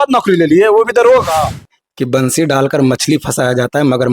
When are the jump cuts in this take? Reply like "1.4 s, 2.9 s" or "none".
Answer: 1.5 s